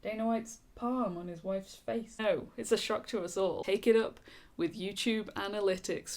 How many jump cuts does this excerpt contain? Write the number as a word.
two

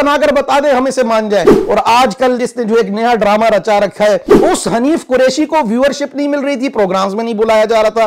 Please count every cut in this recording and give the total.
two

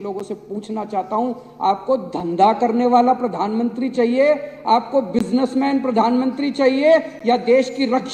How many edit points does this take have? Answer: zero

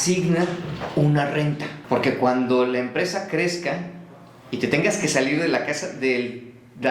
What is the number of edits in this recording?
one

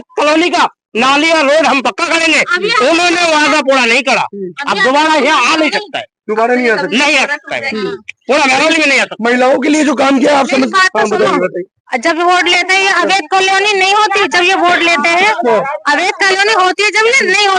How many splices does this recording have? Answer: zero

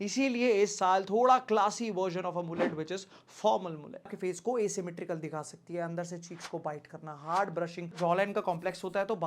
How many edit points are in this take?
two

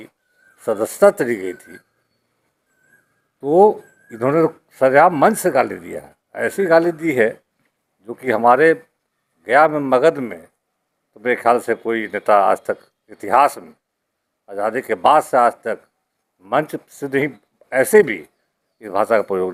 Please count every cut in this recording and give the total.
zero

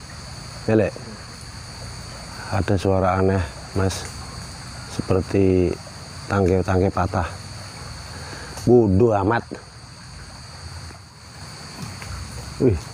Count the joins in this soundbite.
one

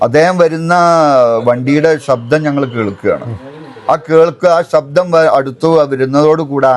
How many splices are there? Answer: zero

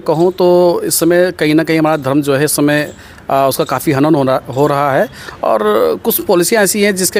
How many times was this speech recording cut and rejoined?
zero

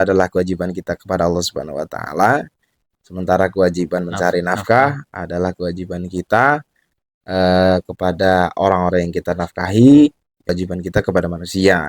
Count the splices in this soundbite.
one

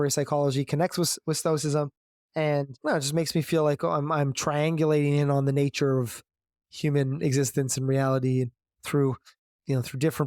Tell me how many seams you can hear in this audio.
zero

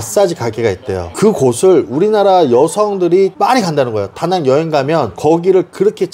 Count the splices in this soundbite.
zero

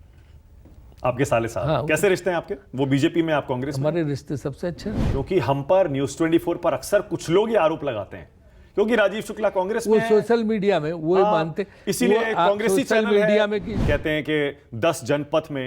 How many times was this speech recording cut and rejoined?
two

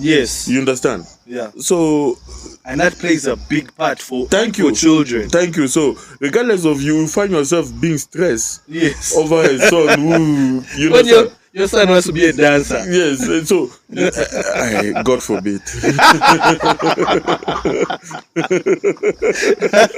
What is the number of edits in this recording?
zero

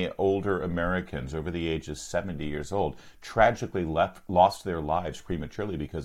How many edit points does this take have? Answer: zero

